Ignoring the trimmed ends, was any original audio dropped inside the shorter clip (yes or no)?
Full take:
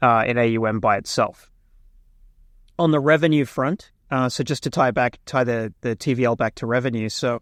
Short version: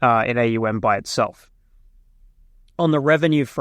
no